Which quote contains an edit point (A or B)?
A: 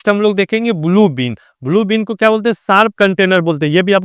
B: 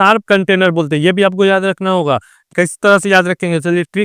B